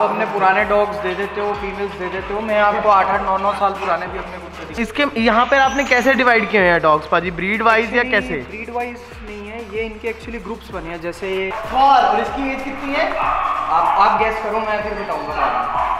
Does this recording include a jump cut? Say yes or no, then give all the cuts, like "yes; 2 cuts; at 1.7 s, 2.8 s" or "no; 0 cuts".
yes; 2 cuts; at 4.8 s, 11.6 s